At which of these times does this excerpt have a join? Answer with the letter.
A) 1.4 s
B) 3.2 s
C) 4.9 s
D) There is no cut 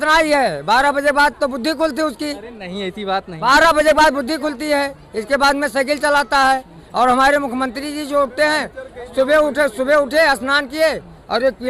D